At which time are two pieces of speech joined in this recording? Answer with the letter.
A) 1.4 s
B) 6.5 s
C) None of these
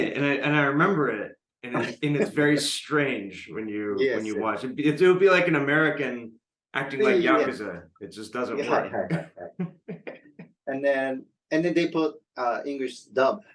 C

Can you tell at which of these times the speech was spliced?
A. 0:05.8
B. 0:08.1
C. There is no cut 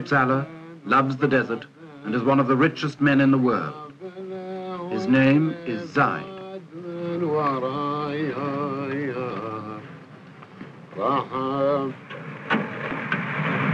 A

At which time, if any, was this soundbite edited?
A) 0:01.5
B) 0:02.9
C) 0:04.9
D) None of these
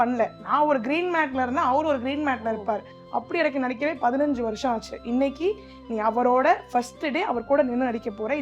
B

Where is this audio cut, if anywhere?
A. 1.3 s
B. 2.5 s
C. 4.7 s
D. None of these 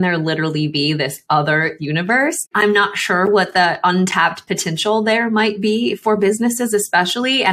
B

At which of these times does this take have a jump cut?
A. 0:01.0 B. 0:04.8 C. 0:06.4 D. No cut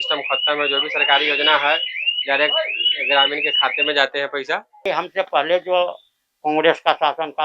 B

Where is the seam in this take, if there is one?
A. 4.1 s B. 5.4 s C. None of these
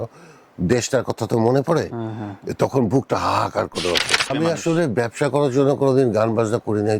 A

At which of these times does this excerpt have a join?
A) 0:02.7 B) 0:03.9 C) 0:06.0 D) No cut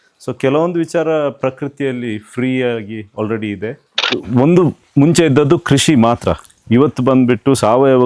B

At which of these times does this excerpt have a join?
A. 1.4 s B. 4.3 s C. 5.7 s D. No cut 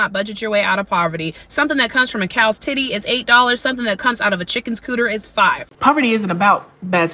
C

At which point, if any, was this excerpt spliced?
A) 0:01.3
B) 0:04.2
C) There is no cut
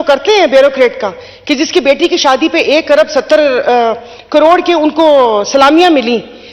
C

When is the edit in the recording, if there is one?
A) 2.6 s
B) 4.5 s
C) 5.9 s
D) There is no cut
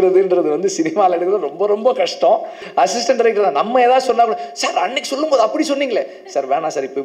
A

